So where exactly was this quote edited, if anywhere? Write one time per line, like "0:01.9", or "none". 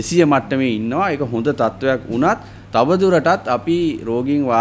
none